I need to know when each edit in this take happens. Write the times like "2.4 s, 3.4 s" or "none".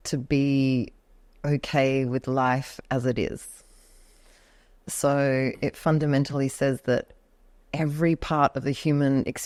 none

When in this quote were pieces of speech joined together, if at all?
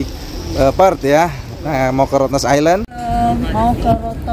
3.0 s

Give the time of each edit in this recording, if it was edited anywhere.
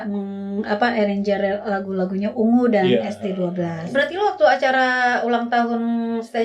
3.8 s

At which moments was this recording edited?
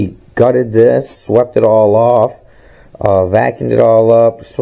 none

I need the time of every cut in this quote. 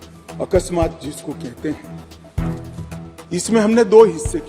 1.9 s, 3.2 s

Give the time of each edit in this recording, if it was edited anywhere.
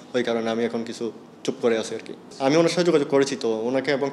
none

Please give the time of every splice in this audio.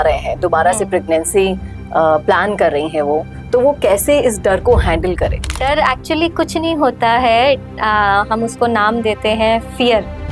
5.6 s

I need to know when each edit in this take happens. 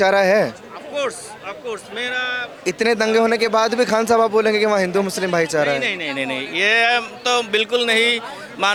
none

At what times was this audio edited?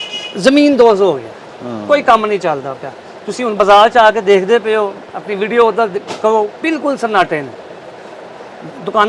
none

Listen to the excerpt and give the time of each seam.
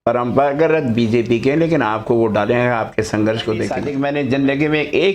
3.8 s

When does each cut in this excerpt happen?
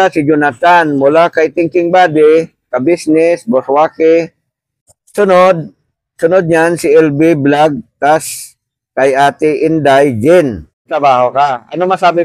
10.9 s

